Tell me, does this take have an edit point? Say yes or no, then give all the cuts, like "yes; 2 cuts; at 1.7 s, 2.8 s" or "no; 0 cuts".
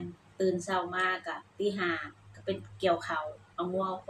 no; 0 cuts